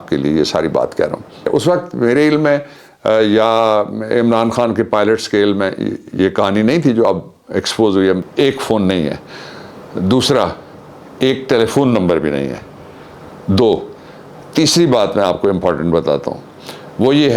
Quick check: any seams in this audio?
yes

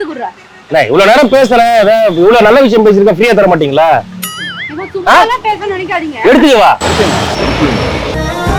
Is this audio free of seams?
yes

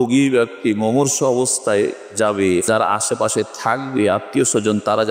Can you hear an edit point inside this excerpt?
yes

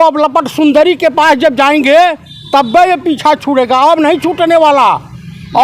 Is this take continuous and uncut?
yes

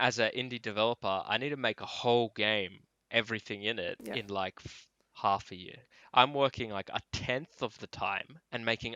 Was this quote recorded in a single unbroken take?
no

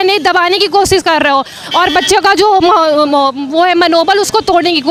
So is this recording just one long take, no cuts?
yes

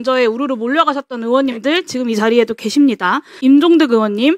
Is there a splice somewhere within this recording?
yes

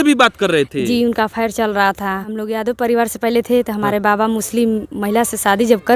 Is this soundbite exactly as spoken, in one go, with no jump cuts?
no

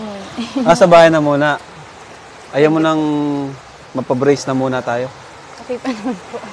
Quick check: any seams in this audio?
no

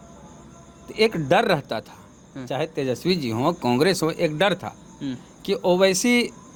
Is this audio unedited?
yes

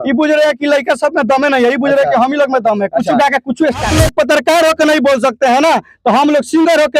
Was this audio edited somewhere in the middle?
yes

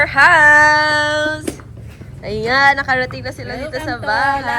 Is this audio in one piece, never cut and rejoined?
yes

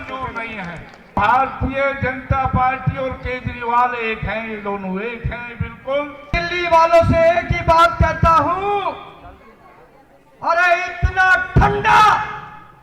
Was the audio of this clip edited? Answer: yes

